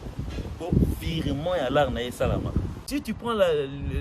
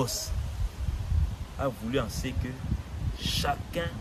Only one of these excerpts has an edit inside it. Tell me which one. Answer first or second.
first